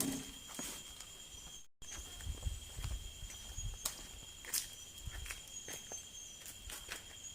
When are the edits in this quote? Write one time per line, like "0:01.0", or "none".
0:01.6